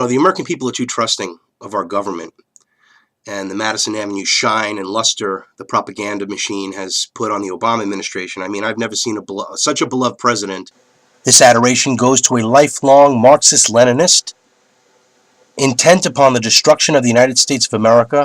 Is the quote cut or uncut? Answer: cut